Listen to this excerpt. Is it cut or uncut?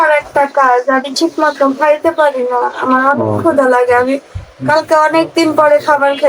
uncut